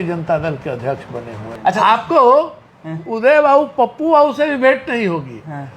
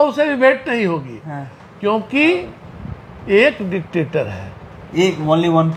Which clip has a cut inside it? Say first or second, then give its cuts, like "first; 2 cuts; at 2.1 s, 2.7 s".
first; 1 cut; at 1.5 s